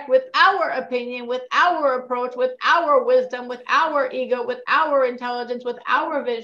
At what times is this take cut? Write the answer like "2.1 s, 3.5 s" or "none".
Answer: none